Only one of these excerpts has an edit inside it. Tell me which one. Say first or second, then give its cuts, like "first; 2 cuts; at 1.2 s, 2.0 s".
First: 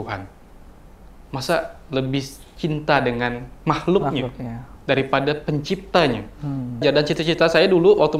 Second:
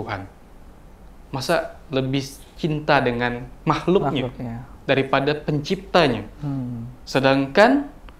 first; 1 cut; at 6.8 s